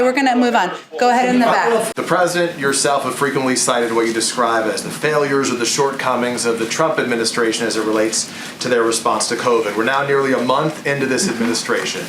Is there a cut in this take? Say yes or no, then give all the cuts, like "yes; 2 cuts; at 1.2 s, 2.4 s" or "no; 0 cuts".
yes; 1 cut; at 1.9 s